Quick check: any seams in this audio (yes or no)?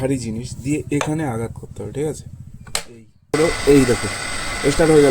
yes